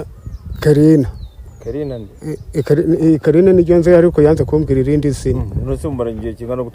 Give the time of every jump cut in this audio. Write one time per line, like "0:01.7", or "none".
none